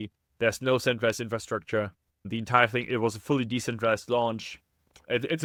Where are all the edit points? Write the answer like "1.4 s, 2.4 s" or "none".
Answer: none